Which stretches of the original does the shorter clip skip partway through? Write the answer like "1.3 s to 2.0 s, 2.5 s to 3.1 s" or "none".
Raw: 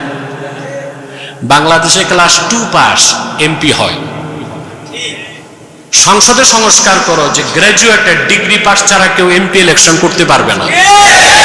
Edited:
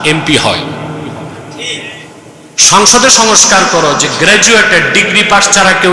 none